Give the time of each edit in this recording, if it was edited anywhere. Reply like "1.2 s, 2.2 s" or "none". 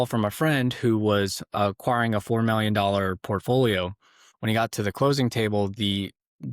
4.3 s